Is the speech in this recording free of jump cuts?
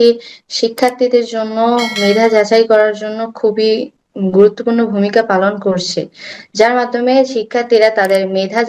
yes; 0 cuts

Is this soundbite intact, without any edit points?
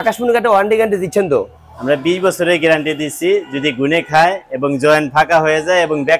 yes; 0 cuts

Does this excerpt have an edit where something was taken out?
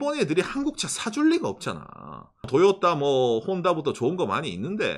yes; 1 cut; at 2.4 s

